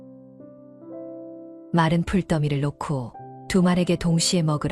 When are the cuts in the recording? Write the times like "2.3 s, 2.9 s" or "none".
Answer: 1.7 s

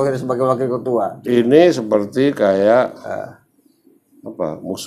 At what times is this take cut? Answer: none

